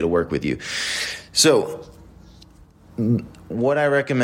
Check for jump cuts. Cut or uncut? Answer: uncut